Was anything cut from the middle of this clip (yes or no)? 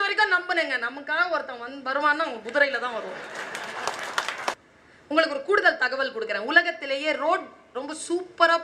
yes